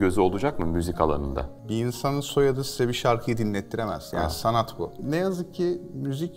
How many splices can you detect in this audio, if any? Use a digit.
2